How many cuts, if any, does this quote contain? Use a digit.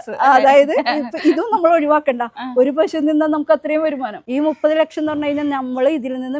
1